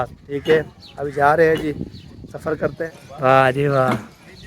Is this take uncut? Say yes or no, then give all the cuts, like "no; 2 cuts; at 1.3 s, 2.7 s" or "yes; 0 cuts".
no; 1 cut; at 2.8 s